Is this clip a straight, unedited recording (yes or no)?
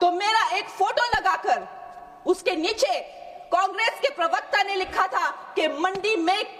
yes